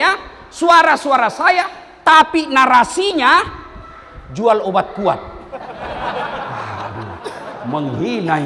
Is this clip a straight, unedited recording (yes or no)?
yes